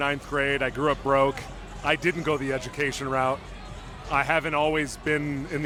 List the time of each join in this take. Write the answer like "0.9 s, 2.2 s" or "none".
none